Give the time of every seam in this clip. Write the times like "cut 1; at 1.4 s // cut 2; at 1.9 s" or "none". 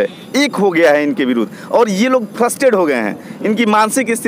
none